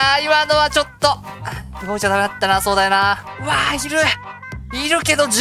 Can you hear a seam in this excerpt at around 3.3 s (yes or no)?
yes